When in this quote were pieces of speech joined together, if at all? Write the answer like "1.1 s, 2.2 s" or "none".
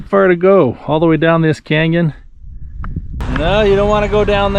2.6 s